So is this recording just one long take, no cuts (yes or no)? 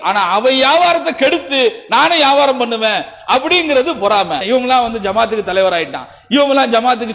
no